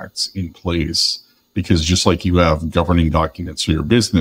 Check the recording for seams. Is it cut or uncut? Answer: uncut